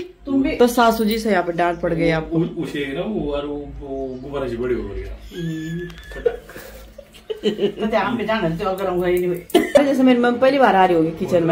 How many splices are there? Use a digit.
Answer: 1